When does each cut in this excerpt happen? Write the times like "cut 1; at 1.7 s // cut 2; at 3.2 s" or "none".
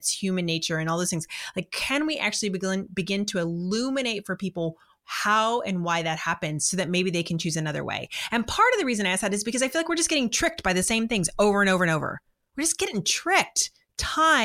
none